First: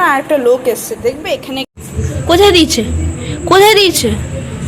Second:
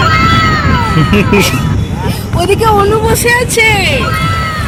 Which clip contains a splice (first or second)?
first